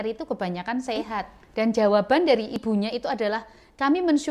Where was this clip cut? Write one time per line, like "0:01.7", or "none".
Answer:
0:01.4
0:02.6